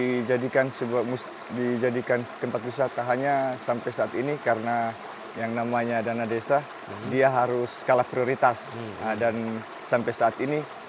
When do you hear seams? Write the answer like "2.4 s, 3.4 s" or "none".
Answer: none